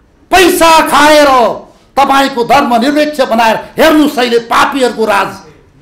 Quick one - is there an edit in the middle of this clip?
no; 0 cuts

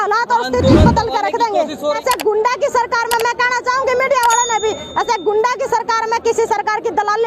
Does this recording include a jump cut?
yes; 1 cut; at 1.8 s

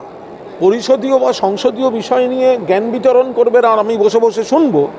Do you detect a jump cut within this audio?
no; 0 cuts

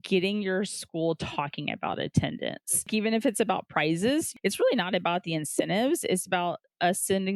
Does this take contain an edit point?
yes; 2 cuts; at 2.9 s, 4.3 s

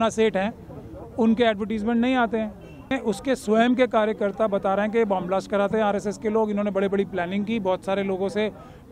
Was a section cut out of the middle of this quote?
yes; 1 cut; at 2.9 s

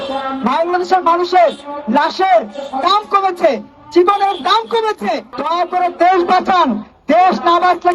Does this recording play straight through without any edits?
no; 1 cut; at 5.3 s

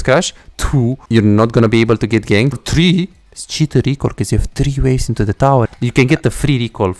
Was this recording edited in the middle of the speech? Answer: yes; 3 cuts; at 1.0 s, 2.6 s, 5.7 s

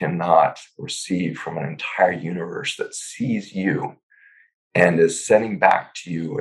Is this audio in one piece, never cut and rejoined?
yes; 0 cuts

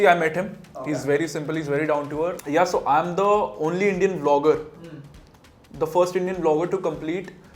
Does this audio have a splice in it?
yes; 1 cut; at 2.4 s

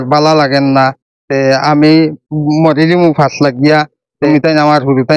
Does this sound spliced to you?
yes; 1 cut; at 4.2 s

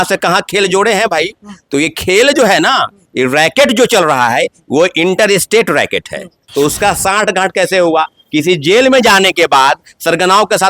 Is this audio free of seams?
no; 1 cut; at 6.4 s

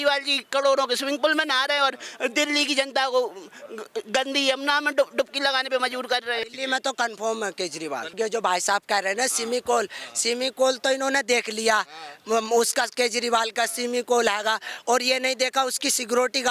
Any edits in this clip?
yes; 2 cuts; at 6.5 s, 8.1 s

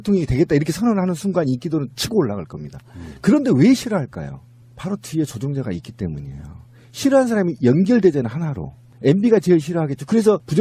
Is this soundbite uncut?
no; 1 cut; at 5.2 s

